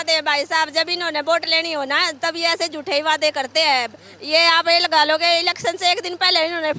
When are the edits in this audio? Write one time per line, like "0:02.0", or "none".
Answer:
none